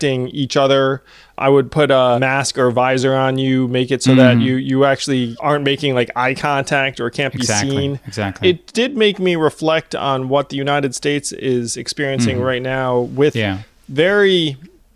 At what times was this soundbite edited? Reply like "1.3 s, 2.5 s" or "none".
1.4 s, 2.2 s, 5.3 s, 8.4 s, 13.7 s

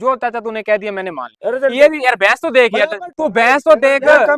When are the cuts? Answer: 1.3 s, 3.0 s

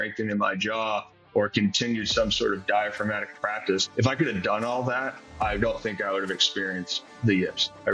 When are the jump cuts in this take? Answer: 3.8 s, 5.3 s, 7.1 s

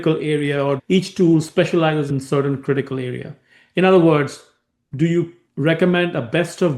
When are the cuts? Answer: 0.8 s, 2.1 s, 5.4 s

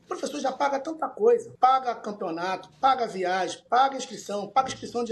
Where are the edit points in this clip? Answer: 1.5 s

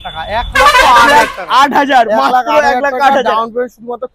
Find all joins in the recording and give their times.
none

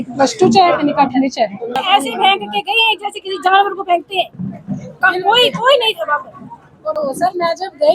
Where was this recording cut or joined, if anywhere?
1.7 s, 6.8 s

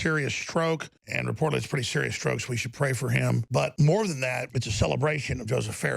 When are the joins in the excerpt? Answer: 1.0 s, 3.6 s, 4.5 s

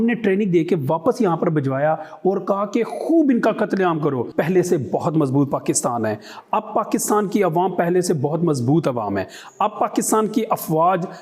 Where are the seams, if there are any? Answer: 4.2 s

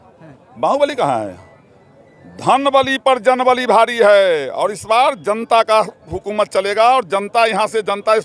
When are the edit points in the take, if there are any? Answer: none

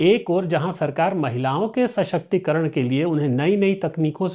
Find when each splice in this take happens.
none

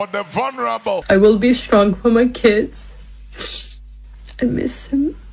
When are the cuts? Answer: 1.0 s

